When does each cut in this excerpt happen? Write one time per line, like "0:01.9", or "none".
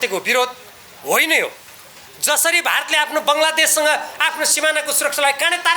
none